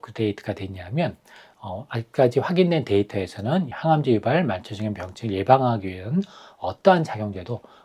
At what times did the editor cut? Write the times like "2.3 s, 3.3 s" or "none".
3.7 s